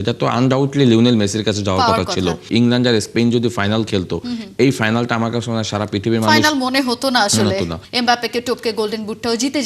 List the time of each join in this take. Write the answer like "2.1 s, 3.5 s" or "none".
2.4 s, 7.8 s